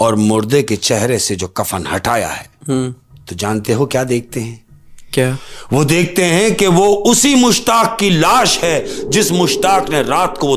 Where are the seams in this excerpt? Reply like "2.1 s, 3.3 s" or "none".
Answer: none